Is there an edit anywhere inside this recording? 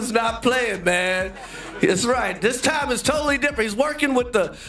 no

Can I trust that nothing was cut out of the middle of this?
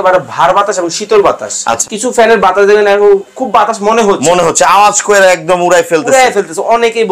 no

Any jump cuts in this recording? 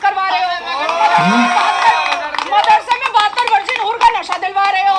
no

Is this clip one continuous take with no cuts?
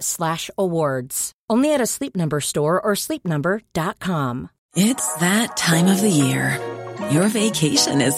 no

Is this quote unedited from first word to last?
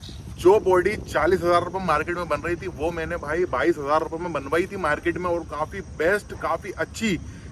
yes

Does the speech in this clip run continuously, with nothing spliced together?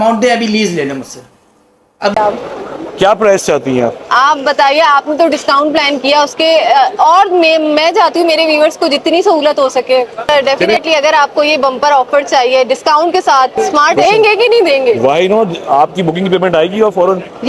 no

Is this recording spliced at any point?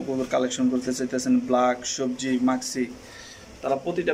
no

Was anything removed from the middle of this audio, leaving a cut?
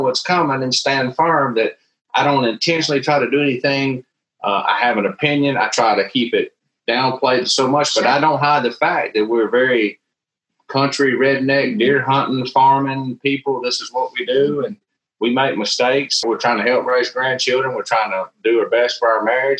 yes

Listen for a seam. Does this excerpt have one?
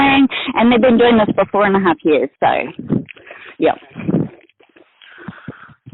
no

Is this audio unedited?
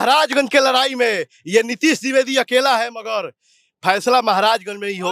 yes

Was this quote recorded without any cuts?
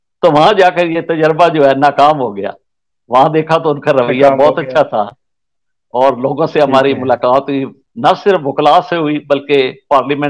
yes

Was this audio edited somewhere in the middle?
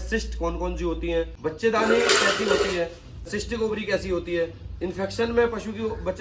yes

